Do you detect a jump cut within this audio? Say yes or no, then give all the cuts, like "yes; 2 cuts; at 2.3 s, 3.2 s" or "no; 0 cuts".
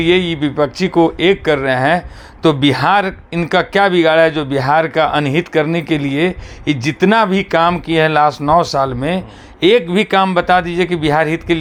no; 0 cuts